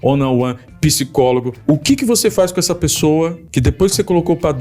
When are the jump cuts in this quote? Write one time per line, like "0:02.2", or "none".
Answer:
0:01.5
0:03.4